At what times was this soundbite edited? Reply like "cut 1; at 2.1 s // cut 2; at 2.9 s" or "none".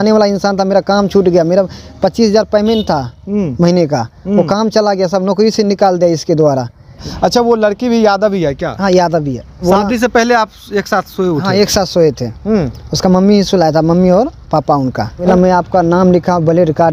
cut 1; at 7.0 s // cut 2; at 9.7 s // cut 3; at 15.3 s